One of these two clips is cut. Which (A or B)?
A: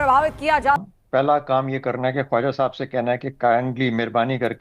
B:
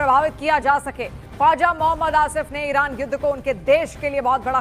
A